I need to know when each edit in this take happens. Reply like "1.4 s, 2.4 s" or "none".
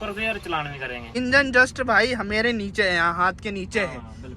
1.1 s